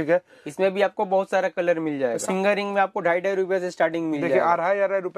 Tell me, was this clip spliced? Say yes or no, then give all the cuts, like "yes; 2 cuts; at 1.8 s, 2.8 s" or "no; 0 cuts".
yes; 1 cut; at 2.2 s